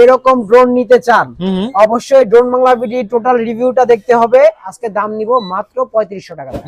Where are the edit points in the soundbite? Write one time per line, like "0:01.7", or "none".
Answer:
0:04.7